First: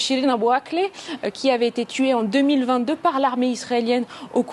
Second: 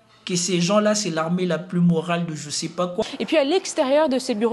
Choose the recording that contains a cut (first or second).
second